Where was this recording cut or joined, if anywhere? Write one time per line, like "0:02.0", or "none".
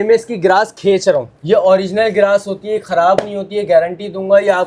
0:01.3